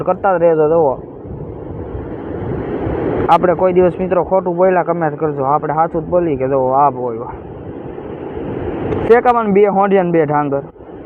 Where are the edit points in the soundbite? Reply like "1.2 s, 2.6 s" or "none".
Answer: none